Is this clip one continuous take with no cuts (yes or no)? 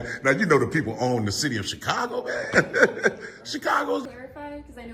no